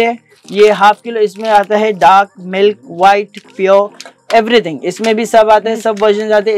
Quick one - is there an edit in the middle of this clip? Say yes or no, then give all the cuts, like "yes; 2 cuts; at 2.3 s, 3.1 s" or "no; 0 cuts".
no; 0 cuts